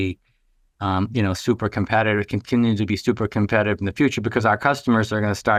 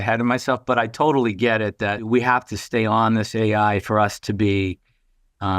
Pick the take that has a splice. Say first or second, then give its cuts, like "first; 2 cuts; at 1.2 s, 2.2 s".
second; 1 cut; at 2.1 s